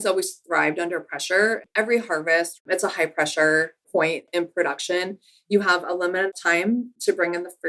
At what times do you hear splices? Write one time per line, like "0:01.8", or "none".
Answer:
0:06.3